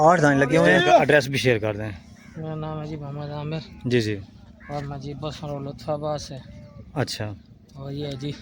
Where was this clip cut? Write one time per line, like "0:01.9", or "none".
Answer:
0:01.0